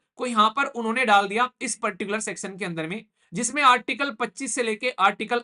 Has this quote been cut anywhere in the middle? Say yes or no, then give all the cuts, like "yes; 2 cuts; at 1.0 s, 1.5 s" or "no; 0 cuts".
no; 0 cuts